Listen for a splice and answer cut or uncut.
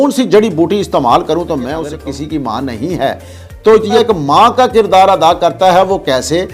cut